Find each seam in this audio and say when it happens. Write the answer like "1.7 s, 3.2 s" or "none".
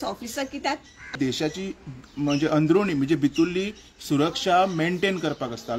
1.1 s